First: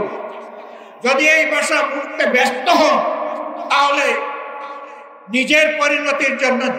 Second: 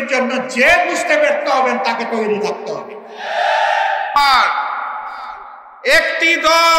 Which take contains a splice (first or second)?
second